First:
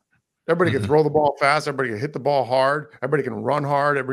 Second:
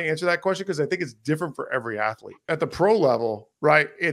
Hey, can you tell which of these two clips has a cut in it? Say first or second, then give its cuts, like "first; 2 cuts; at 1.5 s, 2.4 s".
second; 1 cut; at 2.5 s